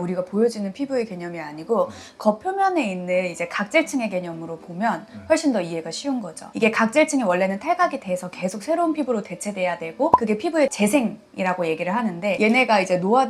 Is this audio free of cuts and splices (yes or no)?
yes